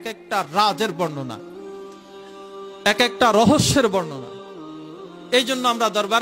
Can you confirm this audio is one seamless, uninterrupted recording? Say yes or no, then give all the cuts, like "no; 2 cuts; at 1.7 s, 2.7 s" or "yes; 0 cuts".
yes; 0 cuts